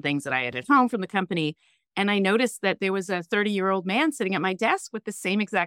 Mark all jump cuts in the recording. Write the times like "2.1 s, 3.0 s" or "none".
none